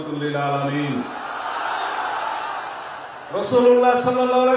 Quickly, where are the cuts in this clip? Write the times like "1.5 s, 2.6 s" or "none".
none